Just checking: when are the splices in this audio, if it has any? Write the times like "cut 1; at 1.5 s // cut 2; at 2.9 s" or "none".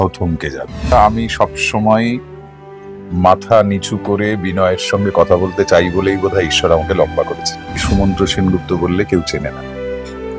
cut 1; at 0.9 s // cut 2; at 7.8 s